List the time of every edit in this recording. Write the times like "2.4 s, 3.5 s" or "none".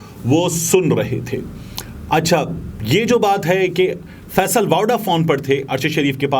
none